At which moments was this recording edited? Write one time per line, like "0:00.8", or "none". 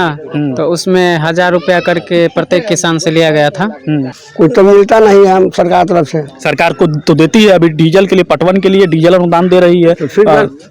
0:04.2